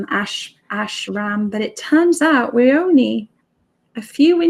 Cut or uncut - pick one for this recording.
uncut